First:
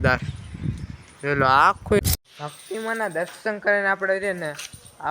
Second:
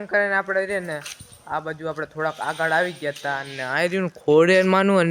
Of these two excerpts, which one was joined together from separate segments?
first; 1 cut; at 2.0 s

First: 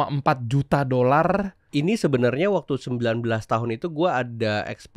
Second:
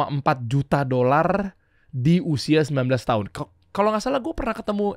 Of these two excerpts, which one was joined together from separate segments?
first; 1 cut; at 1.6 s

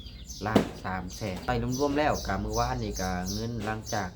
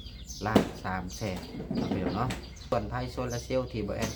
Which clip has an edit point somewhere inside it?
first; 1 cut; at 1.4 s

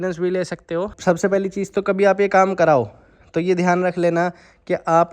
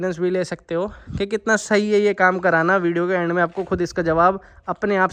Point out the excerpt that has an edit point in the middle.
first; 1 cut; at 0.9 s

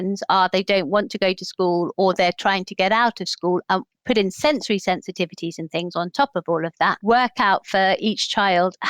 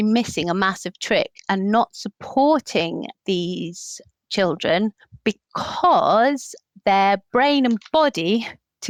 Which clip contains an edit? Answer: first; 3 cuts; at 1.9 s, 3.9 s, 6.9 s

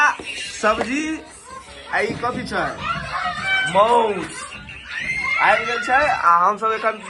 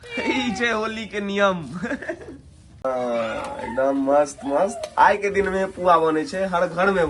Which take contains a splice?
second; 1 cut; at 2.8 s

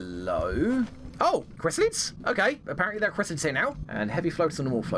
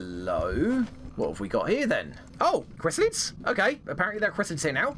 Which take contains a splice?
first; 1 cut; at 1.0 s

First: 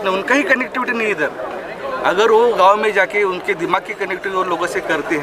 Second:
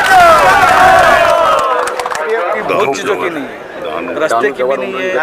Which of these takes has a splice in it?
second; 1 cut; at 2.6 s

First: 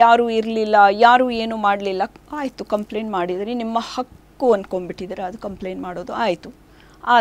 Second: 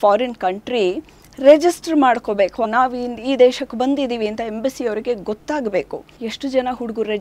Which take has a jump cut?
second; 2 cuts; at 2.7 s, 6.0 s

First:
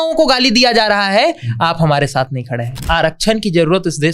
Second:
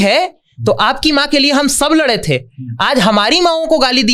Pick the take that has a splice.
first; 1 cut; at 2.8 s

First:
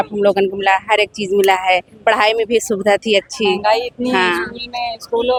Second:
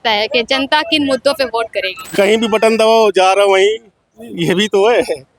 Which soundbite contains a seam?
second; 1 cut; at 2.0 s

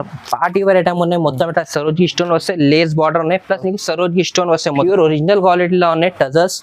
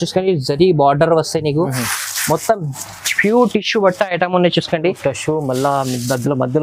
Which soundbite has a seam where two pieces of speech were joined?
first; 1 cut; at 4.8 s

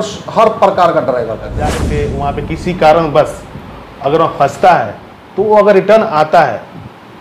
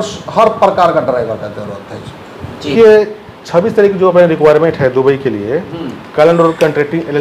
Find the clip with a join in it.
first; 1 cut; at 1.9 s

